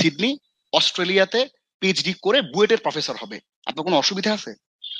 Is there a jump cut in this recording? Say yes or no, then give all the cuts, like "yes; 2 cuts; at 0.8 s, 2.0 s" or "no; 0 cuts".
no; 0 cuts